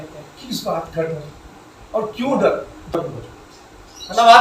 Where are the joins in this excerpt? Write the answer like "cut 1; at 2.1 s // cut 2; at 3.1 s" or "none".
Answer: cut 1; at 2.9 s